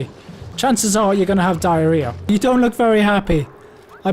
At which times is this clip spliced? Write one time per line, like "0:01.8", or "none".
0:02.3